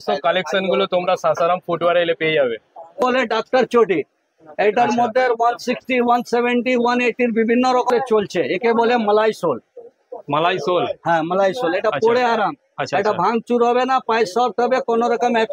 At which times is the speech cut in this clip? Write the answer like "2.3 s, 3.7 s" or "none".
3.0 s, 7.9 s